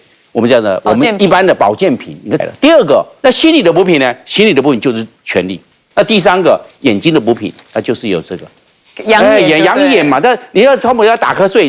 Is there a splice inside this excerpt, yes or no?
yes